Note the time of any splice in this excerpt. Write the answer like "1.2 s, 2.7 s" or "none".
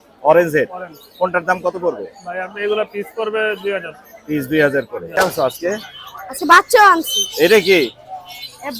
5.1 s